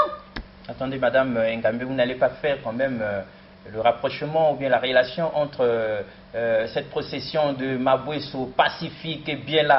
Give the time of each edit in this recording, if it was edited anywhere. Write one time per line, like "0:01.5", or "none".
none